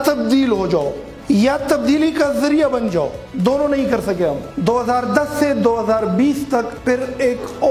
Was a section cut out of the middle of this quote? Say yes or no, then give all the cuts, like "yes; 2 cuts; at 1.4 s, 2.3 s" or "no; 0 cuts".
yes; 2 cuts; at 4.4 s, 6.7 s